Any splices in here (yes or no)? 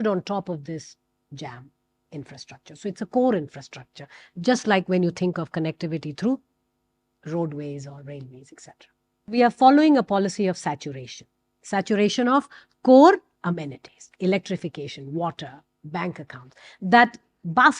yes